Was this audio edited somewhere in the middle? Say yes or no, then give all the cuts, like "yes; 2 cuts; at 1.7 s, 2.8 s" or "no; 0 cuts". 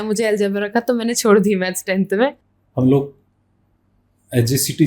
yes; 1 cut; at 2.5 s